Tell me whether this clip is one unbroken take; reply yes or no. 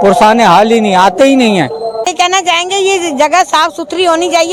no